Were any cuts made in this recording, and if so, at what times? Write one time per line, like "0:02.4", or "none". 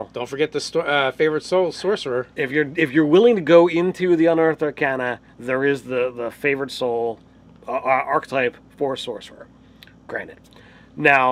none